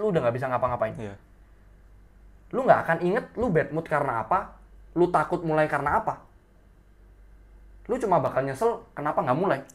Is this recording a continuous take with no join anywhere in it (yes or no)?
yes